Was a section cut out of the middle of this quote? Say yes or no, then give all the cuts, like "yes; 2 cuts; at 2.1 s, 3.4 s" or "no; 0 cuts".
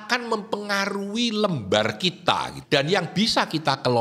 yes; 1 cut; at 2.5 s